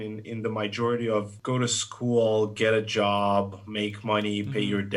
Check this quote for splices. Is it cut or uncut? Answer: cut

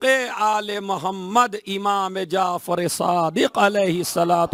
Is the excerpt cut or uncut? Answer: uncut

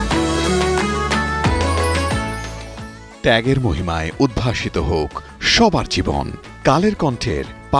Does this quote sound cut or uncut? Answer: uncut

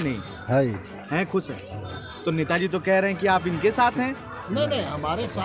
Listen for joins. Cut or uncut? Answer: uncut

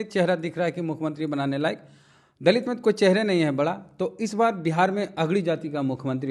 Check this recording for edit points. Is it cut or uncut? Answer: uncut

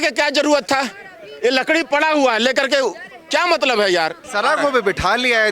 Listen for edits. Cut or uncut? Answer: cut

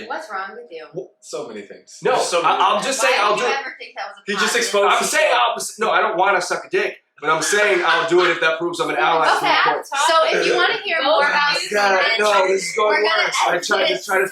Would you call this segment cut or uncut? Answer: uncut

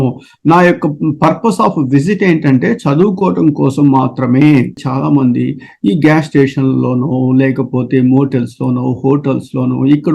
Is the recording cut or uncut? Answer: cut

